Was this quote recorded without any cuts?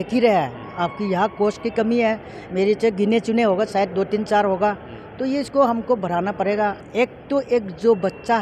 no; 1 cut; at 6.8 s

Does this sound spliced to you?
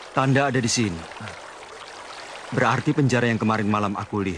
no; 0 cuts

